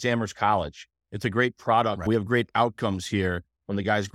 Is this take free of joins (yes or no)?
no